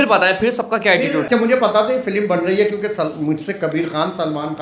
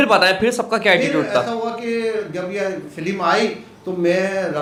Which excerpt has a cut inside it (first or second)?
first